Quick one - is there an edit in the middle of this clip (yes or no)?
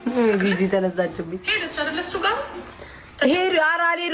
no